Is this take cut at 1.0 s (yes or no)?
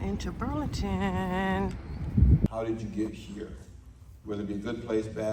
no